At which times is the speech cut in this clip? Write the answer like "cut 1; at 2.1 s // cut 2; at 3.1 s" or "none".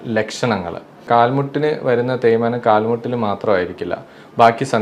cut 1; at 1.1 s

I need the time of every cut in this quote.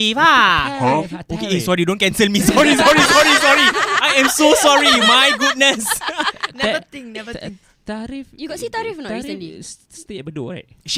none

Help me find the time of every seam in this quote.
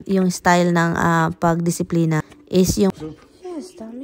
cut 1; at 3.0 s

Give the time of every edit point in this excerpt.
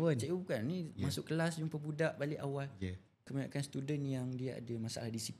cut 1; at 3.2 s

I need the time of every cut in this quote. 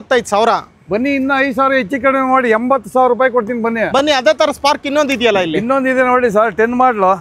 none

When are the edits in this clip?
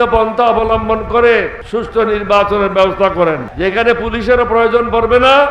none

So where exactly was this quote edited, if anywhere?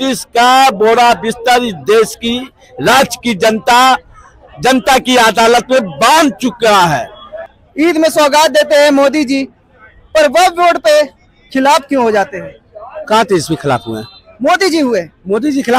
cut 1; at 7.4 s

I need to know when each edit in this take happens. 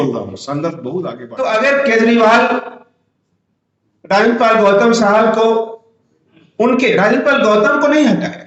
cut 1; at 1.2 s

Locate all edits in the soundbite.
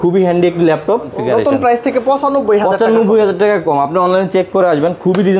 cut 1; at 1.1 s

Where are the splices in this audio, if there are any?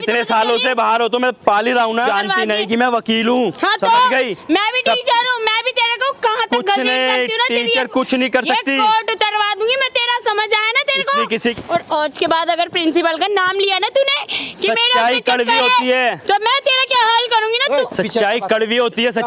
cut 1; at 2.1 s // cut 2; at 11.5 s

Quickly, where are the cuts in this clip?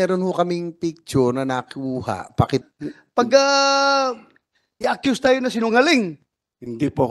cut 1; at 2.6 s

